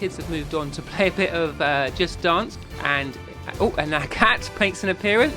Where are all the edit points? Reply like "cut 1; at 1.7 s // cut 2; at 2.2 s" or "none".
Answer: cut 1; at 2.6 s